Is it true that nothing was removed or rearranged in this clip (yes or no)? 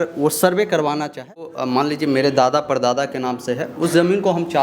no